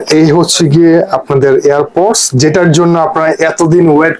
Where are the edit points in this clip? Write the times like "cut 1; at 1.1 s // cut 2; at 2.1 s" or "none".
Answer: none